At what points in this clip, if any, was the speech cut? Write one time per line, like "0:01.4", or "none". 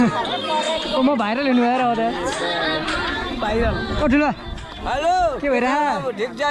none